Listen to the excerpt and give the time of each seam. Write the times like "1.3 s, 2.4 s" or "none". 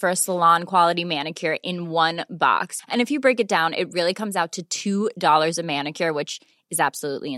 none